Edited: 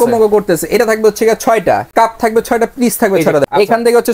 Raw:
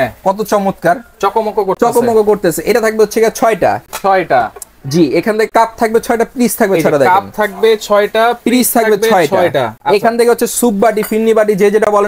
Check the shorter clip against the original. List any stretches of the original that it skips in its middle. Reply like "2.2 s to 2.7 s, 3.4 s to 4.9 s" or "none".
3.9 s to 5.5 s, 7.0 s to 9.8 s